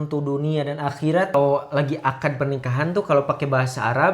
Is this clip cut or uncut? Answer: cut